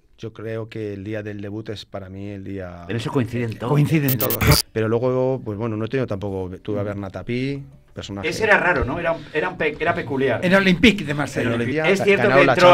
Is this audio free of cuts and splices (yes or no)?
no